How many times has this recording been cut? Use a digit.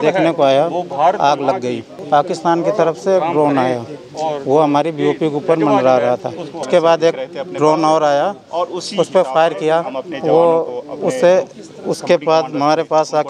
2